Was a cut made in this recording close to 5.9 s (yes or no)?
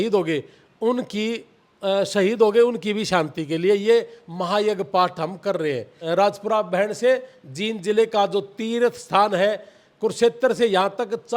yes